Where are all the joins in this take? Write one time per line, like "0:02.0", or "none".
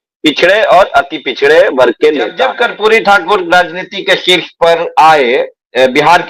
0:02.4